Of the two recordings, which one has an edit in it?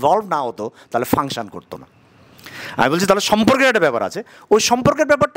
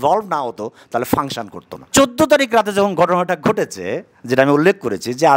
second; 1 cut; at 1.9 s

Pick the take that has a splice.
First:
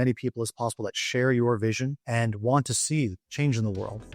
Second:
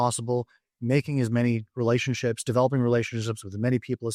first; 2 cuts; at 2.0 s, 3.2 s

